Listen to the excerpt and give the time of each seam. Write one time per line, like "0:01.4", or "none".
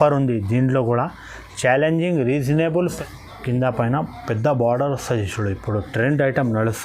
0:02.8